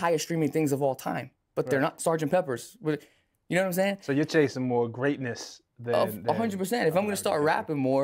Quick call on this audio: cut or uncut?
uncut